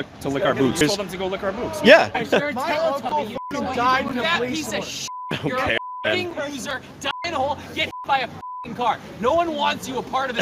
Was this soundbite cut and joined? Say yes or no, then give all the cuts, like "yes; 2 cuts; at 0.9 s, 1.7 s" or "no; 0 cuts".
yes; 2 cuts; at 0.8 s, 2.2 s